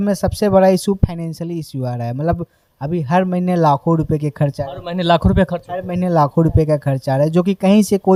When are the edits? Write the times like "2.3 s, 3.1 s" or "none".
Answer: none